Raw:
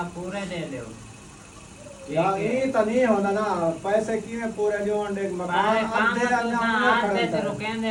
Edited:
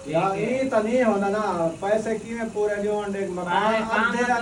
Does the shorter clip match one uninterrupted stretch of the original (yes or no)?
yes